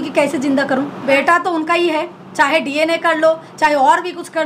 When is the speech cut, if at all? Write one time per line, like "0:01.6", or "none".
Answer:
0:01.1